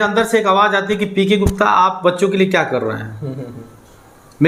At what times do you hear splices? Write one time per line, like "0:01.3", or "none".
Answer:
none